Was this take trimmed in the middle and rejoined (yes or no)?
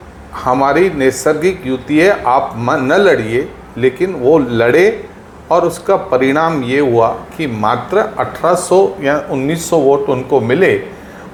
no